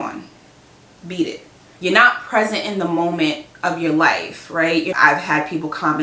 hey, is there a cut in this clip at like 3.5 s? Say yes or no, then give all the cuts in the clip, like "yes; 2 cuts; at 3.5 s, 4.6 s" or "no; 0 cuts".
no; 2 cuts; at 1.6 s, 4.9 s